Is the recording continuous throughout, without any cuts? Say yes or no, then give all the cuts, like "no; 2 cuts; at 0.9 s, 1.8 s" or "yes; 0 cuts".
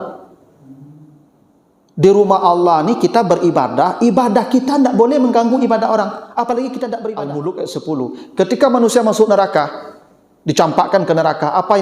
no; 1 cut; at 7.3 s